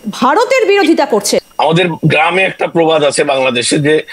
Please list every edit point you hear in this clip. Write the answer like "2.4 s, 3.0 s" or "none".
1.5 s